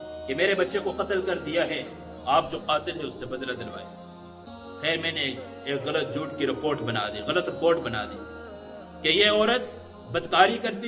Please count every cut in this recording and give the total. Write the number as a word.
one